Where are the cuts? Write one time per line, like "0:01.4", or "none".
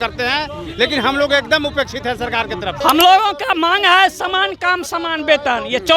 0:02.8